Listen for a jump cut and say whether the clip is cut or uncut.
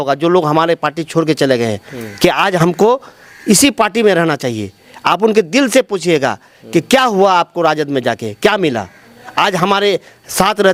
uncut